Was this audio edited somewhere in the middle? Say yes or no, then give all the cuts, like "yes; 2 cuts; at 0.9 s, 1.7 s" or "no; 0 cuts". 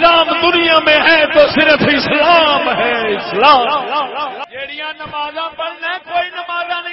yes; 1 cut; at 4.4 s